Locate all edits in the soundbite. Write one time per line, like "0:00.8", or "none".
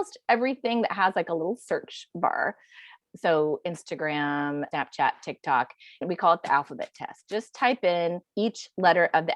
0:02.9
0:04.7
0:06.0
0:08.2